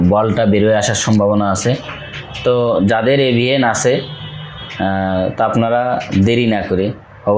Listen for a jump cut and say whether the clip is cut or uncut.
uncut